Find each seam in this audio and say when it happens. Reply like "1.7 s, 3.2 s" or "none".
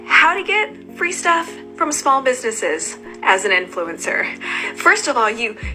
none